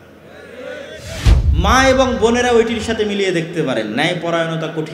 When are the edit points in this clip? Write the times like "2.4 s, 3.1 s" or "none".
1.4 s